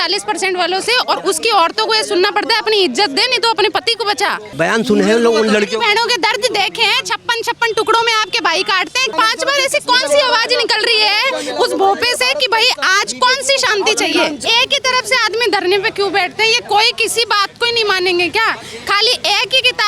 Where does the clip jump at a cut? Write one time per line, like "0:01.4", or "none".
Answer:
0:04.4
0:09.1
0:14.4